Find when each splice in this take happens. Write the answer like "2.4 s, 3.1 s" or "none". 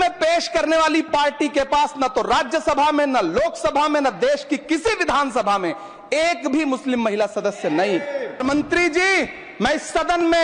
8.4 s